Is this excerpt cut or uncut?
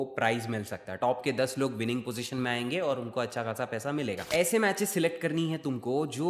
cut